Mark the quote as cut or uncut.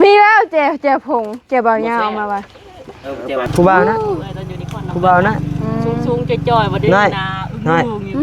cut